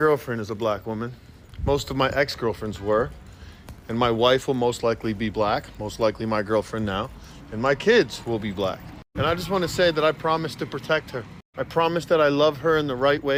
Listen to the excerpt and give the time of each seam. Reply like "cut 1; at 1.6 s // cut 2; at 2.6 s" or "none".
none